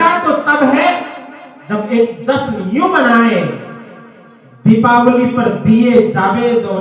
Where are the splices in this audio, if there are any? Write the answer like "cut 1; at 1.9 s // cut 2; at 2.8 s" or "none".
none